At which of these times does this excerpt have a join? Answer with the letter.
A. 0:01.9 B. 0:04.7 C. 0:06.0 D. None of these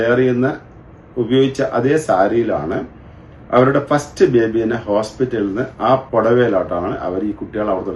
C